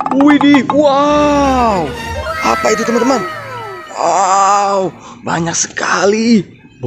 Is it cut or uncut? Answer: uncut